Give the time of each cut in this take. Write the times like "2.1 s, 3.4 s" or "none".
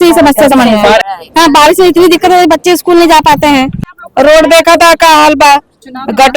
1.1 s, 3.8 s

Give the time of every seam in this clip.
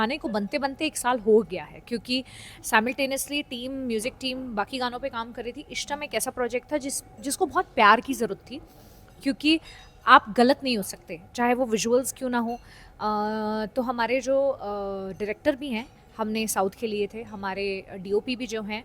none

